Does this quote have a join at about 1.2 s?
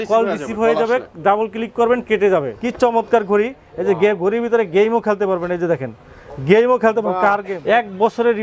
no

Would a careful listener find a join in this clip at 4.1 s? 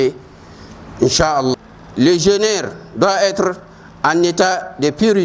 no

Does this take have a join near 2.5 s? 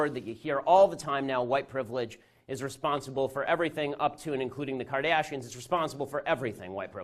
yes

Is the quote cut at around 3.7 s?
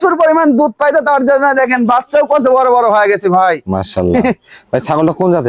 no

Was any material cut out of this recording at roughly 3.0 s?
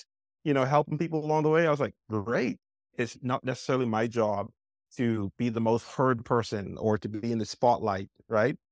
yes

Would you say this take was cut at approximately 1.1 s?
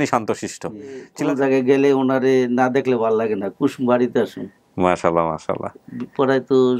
yes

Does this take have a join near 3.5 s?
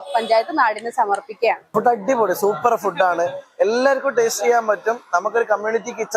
no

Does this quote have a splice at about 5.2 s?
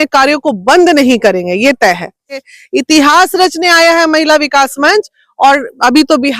no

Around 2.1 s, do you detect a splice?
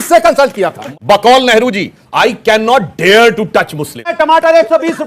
no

